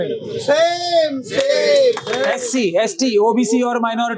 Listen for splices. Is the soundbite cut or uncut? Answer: cut